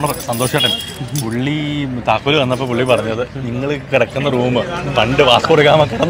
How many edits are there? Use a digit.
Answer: 0